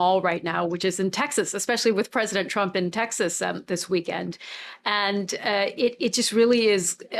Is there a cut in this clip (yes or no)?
no